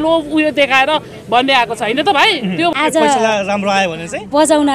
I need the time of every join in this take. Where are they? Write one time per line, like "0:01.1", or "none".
0:02.7